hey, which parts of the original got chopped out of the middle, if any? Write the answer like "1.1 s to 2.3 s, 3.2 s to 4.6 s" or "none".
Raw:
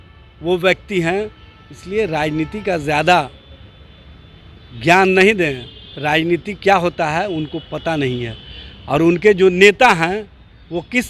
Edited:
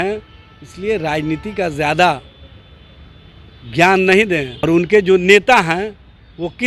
5.7 s to 8.9 s